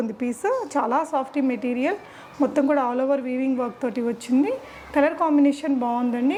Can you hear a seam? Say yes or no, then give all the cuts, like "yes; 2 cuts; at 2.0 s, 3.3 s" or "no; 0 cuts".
no; 0 cuts